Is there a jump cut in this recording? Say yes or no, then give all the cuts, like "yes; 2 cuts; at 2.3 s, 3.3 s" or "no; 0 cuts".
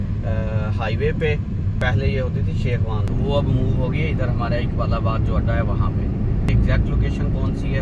yes; 3 cuts; at 1.8 s, 3.1 s, 6.5 s